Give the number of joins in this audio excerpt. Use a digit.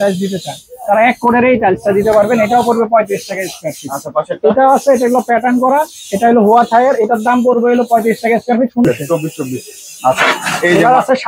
1